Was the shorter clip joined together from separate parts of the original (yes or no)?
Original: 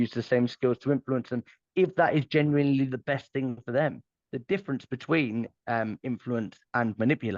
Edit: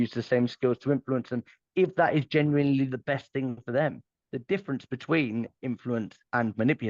yes